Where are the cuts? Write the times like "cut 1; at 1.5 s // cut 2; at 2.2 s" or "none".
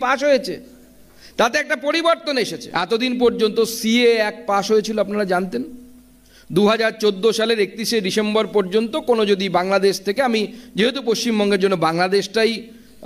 cut 1; at 2.6 s

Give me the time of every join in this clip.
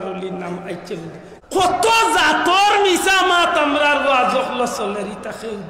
cut 1; at 1.2 s

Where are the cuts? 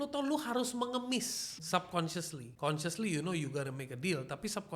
cut 1; at 1.4 s // cut 2; at 2.4 s

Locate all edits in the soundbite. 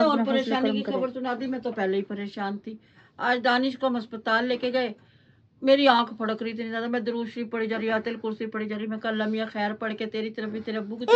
none

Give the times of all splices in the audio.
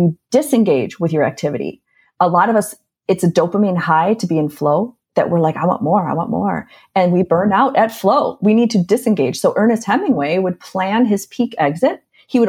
none

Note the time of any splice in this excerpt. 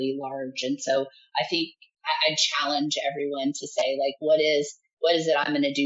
none

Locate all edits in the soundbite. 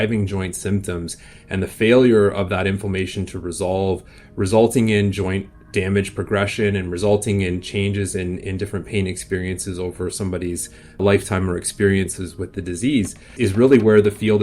cut 1; at 11.0 s // cut 2; at 13.3 s

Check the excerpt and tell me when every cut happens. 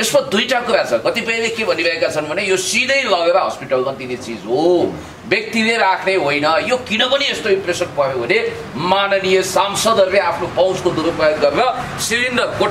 none

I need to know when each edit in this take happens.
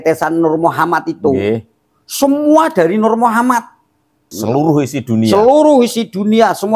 cut 1; at 4.3 s

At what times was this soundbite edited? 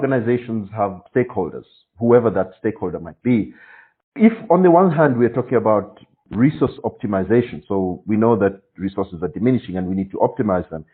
cut 1; at 1.0 s

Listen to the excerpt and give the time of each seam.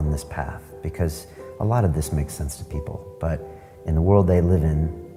none

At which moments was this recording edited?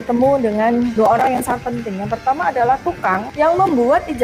cut 1; at 0.9 s // cut 2; at 3.3 s

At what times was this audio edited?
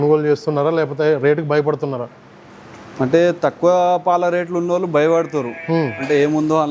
none

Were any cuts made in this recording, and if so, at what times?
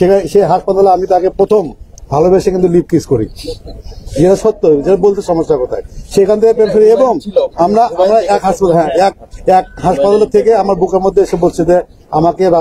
none

